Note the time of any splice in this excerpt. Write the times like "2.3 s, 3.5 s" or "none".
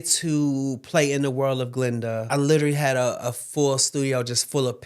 2.2 s